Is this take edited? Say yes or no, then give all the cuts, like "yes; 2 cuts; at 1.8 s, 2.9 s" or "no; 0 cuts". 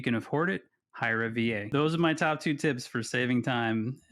yes; 1 cut; at 1.7 s